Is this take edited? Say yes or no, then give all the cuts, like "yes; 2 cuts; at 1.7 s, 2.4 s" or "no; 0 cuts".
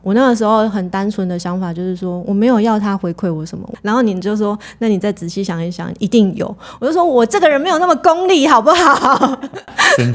no; 0 cuts